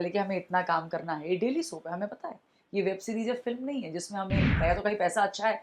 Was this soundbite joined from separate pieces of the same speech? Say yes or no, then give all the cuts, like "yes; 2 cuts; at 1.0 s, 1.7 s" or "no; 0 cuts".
yes; 1 cut; at 4.5 s